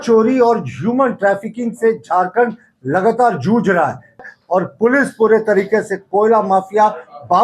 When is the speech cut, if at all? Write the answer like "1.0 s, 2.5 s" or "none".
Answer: 4.3 s